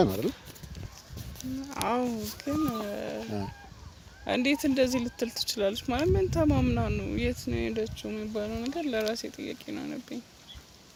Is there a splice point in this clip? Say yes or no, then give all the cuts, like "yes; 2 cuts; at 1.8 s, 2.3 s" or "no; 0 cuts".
no; 0 cuts